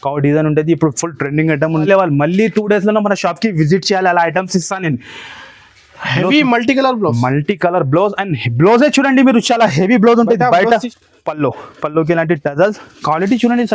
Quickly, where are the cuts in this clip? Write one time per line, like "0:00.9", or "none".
0:01.9
0:10.9

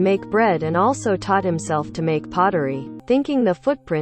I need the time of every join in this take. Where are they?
0:02.9

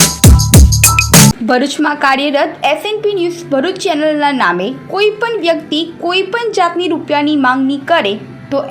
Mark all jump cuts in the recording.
0:01.4

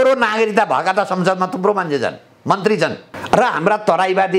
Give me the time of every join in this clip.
0:03.1

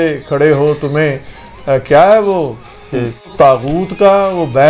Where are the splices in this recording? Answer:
0:03.3

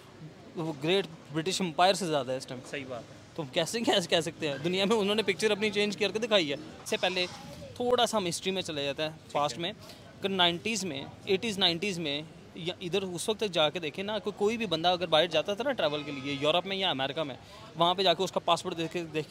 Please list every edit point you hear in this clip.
none

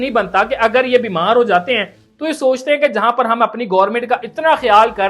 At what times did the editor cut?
none

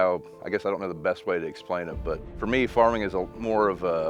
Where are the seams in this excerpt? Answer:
0:02.3

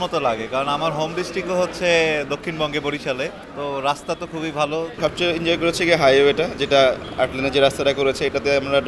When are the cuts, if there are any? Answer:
0:03.4
0:04.9

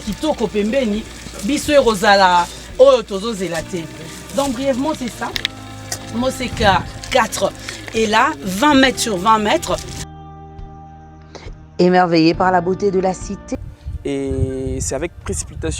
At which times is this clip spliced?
0:13.5

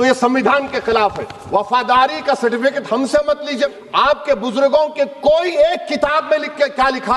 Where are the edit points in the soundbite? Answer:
0:03.7

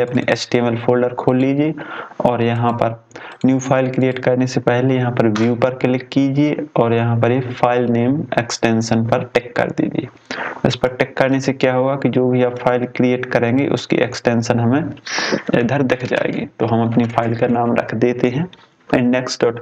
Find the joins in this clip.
none

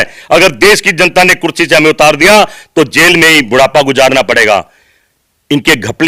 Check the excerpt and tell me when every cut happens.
none

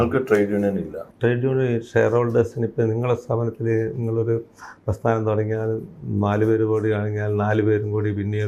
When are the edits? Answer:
0:01.0

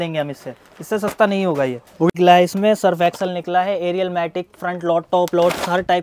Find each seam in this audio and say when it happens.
0:02.1

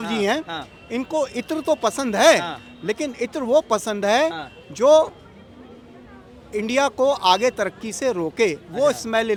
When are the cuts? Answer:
none

